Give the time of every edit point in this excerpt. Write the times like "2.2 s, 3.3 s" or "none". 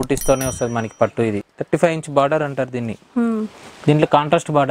1.5 s

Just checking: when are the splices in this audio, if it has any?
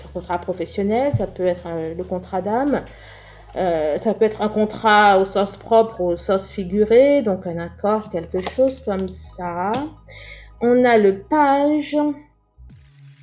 12.3 s

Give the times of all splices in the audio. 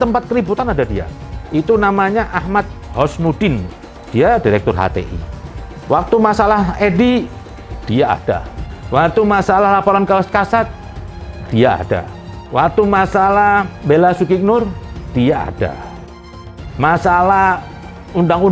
none

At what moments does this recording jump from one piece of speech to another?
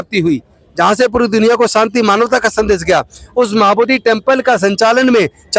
none

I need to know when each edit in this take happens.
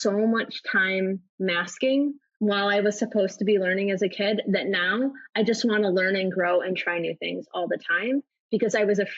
2.3 s

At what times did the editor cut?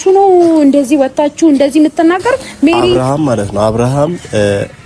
3.0 s

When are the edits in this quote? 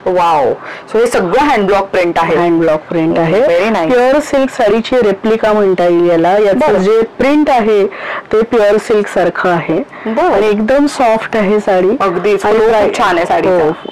none

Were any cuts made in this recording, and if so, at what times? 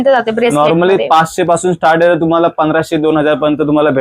none

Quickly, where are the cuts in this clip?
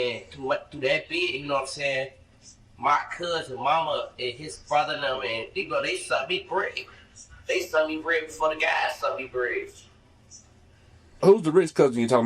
11.2 s

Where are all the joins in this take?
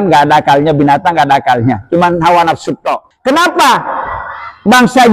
3.1 s

